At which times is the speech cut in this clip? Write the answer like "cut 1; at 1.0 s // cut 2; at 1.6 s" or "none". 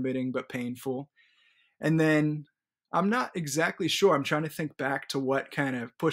none